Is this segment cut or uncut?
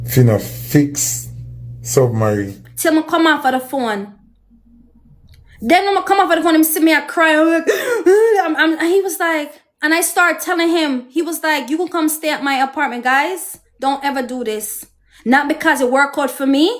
cut